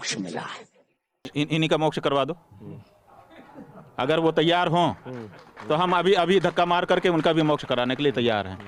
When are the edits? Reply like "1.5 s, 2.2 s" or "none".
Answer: 1.3 s